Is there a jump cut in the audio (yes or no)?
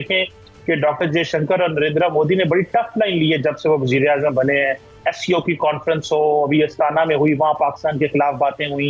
no